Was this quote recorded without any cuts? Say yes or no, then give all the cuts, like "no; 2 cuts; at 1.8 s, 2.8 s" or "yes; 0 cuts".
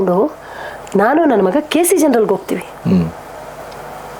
yes; 0 cuts